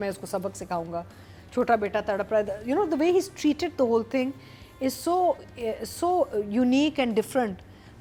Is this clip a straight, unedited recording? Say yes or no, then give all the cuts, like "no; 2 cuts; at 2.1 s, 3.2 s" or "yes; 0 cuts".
yes; 0 cuts